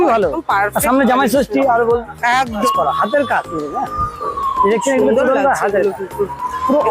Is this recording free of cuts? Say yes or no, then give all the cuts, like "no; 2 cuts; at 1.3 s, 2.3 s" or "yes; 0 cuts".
no; 1 cut; at 2.6 s